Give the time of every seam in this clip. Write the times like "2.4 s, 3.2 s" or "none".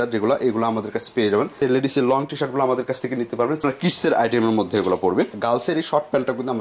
1.5 s, 3.6 s, 5.3 s

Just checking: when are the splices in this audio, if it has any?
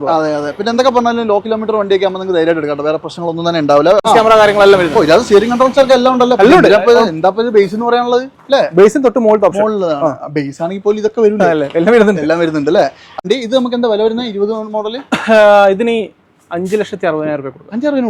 4.0 s, 13.2 s

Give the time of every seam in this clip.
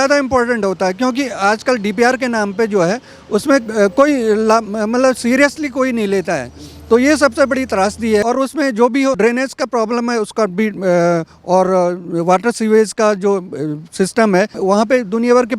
8.2 s, 9.2 s, 14.6 s

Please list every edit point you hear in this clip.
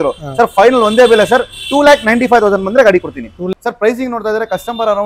3.5 s

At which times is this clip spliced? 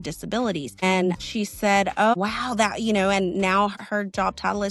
1.2 s, 2.1 s, 3.7 s

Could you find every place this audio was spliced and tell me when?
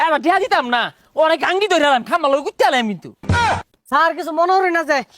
3.3 s

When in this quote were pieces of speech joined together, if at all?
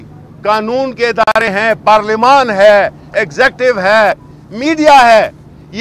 none

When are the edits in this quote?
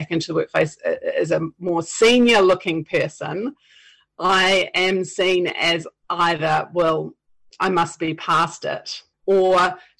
9.1 s

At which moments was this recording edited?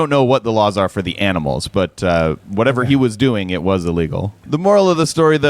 4.4 s

